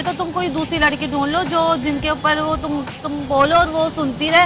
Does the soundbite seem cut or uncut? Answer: uncut